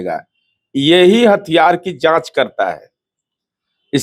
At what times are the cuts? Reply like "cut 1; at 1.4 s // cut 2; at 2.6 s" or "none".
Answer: none